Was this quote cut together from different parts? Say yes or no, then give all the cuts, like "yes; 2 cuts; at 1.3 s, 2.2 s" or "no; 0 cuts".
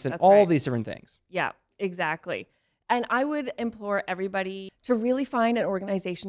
yes; 1 cut; at 4.7 s